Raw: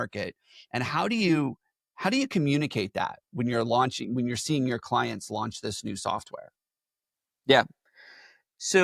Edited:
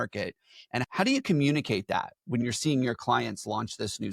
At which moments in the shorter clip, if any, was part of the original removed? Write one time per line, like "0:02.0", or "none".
0:00.9
0:02.4